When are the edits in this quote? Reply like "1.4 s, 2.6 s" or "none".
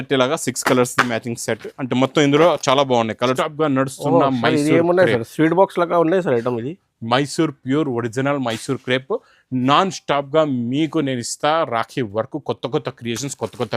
3.4 s